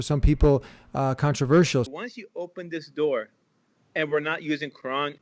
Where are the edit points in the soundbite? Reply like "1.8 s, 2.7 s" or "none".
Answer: 1.9 s